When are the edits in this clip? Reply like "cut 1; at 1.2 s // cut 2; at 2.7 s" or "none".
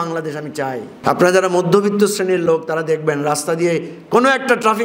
cut 1; at 0.9 s

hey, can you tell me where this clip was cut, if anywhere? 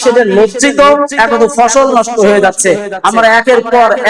cut 1; at 1.1 s

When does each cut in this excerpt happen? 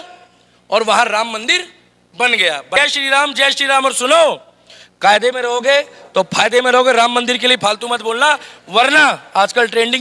cut 1; at 2.7 s

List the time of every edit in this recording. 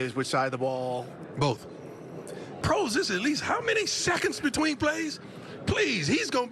cut 1; at 2.5 s

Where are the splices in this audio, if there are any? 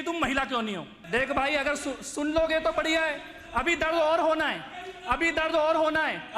cut 1; at 0.9 s

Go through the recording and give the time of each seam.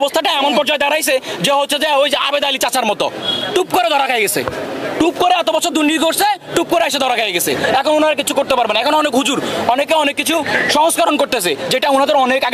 none

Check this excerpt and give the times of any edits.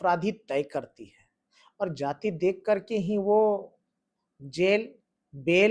none

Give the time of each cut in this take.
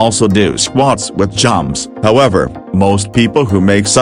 cut 1; at 1.9 s

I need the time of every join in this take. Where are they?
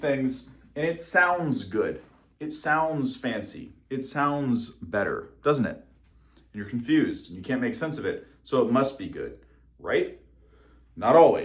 none

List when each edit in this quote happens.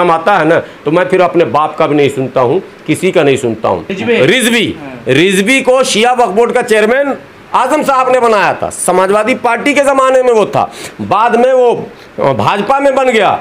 cut 1; at 3.9 s

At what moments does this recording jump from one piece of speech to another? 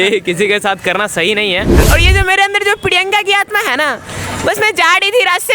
cut 1; at 1.8 s

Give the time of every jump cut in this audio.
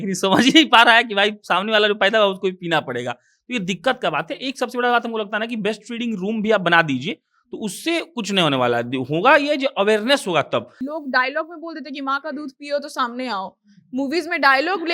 cut 1; at 10.8 s

